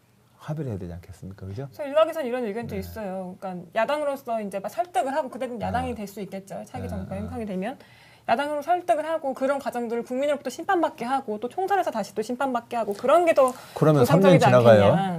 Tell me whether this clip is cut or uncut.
uncut